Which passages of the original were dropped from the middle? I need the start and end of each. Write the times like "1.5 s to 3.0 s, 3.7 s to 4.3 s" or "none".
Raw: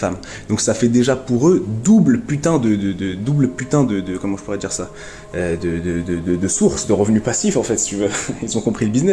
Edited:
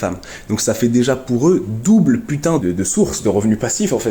2.6 s to 6.2 s